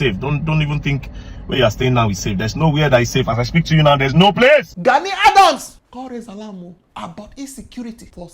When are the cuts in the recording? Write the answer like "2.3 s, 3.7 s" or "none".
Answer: 4.7 s

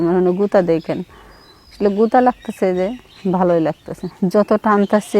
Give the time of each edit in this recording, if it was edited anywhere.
4.1 s

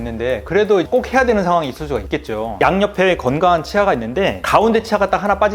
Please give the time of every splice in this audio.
2.6 s

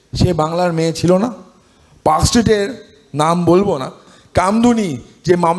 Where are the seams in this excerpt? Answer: 4.1 s

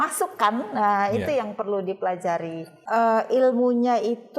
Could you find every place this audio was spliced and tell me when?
2.8 s

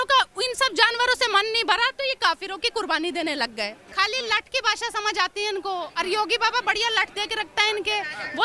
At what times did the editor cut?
3.8 s

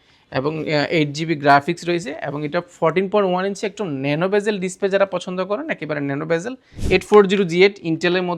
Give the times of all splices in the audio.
6.8 s

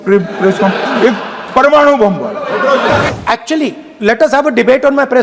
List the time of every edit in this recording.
3.1 s

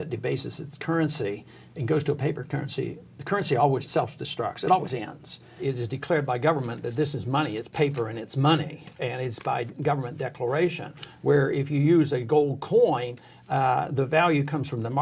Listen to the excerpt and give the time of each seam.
3.9 s, 5.6 s

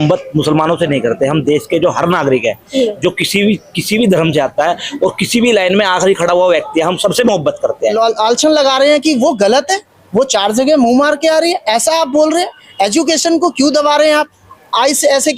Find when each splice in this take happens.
7.9 s

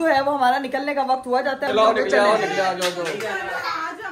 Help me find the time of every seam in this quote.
none

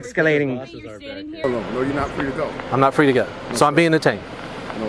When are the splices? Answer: 1.4 s

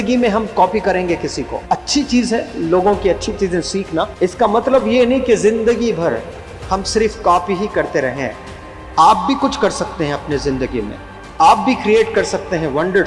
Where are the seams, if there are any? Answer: 1.5 s, 4.1 s

